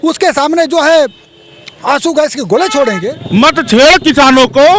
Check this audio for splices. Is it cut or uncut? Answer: cut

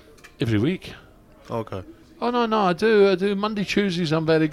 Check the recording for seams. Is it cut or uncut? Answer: uncut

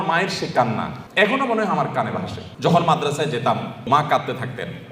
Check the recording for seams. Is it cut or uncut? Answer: cut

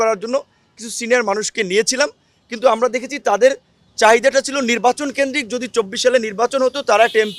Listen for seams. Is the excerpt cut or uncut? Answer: uncut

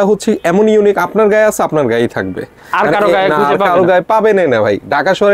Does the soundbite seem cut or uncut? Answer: uncut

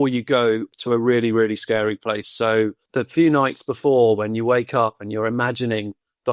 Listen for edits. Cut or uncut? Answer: cut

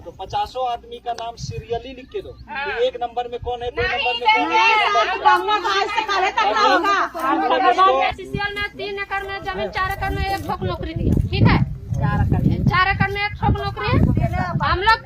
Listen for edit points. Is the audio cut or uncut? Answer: cut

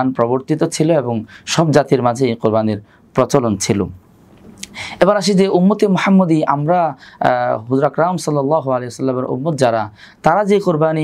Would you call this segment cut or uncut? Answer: uncut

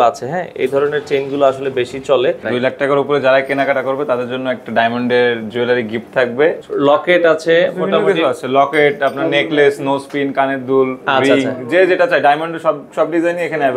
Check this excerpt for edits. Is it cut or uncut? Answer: cut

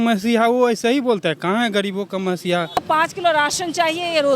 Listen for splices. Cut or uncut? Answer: cut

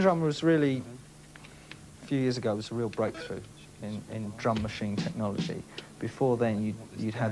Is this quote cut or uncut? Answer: cut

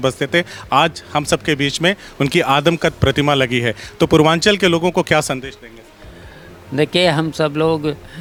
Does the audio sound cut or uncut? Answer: uncut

